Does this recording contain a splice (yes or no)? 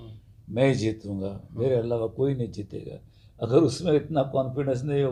no